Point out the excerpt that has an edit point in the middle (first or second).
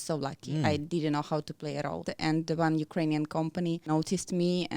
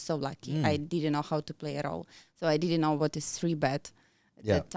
first